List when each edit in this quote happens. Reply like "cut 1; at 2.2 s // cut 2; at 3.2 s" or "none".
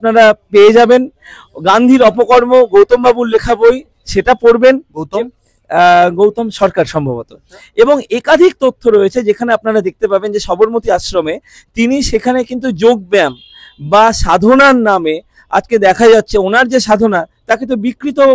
none